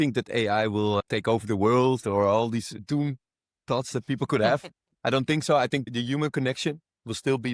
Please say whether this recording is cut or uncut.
cut